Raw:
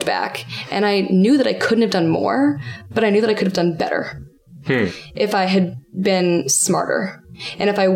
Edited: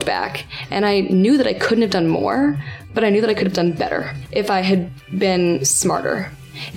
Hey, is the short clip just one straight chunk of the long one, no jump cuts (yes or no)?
no